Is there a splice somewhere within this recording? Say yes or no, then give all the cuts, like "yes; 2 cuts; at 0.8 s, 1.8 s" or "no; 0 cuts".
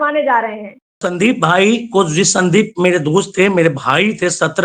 yes; 1 cut; at 1.0 s